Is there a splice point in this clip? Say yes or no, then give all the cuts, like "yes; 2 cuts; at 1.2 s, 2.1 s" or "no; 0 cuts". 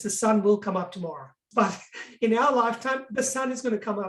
yes; 1 cut; at 1.5 s